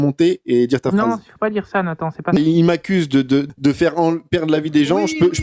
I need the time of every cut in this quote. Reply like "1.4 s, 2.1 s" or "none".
2.4 s, 3.5 s